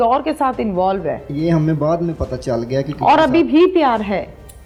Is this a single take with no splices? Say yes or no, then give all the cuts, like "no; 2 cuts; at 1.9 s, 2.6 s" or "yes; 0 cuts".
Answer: yes; 0 cuts